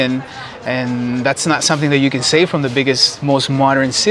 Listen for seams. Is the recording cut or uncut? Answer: uncut